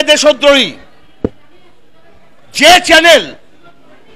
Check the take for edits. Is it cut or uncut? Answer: uncut